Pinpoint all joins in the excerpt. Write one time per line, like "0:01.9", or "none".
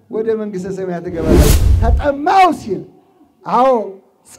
0:01.6